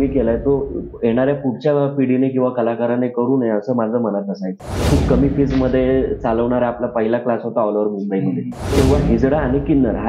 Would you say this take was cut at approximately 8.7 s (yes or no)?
yes